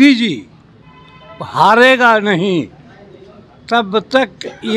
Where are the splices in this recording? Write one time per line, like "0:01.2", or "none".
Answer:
none